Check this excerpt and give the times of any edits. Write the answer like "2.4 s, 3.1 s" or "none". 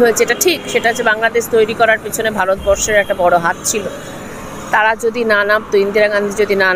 none